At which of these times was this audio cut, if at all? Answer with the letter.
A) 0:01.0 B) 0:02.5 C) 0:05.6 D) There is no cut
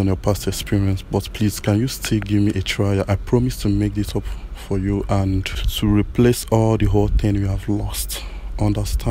C